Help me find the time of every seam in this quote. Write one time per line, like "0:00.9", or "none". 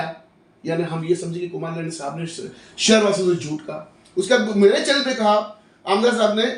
0:05.6